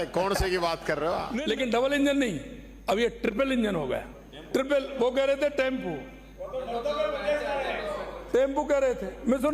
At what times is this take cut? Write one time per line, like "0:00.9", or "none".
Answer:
0:01.3
0:04.6

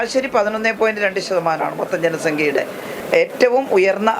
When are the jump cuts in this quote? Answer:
0:02.9

